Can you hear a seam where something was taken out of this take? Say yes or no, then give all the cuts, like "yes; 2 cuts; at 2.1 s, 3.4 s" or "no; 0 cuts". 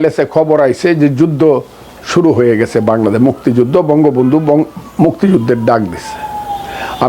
no; 0 cuts